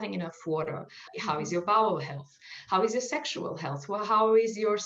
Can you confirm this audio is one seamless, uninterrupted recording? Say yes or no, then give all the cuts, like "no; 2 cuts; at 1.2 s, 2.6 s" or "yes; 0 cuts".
no; 1 cut; at 1.1 s